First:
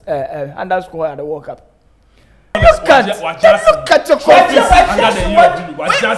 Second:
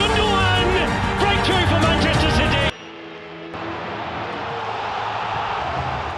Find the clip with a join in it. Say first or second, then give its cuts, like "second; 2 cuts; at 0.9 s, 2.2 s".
first; 1 cut; at 2.6 s